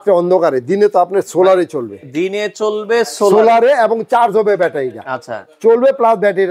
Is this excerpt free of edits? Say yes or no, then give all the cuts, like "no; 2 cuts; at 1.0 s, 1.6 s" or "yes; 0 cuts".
yes; 0 cuts